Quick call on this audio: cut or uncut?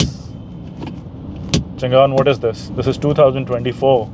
cut